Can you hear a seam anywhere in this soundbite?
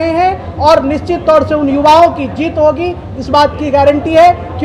no; 0 cuts

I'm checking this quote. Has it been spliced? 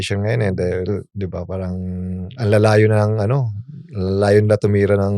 no; 0 cuts

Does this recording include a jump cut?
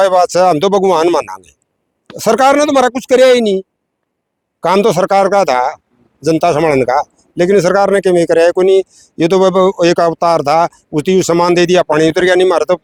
no; 0 cuts

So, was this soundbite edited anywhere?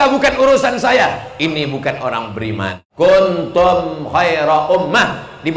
yes; 1 cut; at 2.8 s

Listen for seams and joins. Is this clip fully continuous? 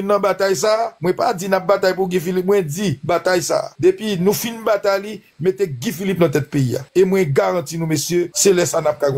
yes; 0 cuts

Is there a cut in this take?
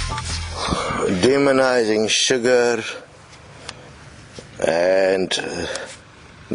yes; 1 cut; at 0.9 s

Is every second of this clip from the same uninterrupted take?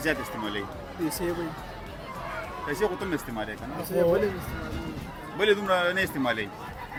yes; 0 cuts

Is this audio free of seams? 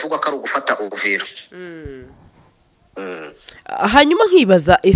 yes; 0 cuts

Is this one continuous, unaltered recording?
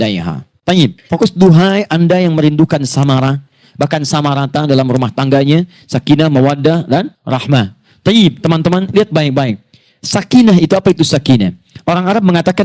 no; 1 cut; at 1.0 s

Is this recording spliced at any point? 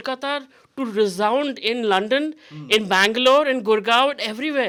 no; 0 cuts

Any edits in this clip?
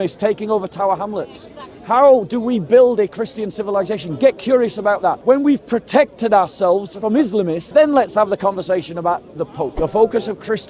yes; 3 cuts; at 5.2 s, 7.6 s, 9.7 s

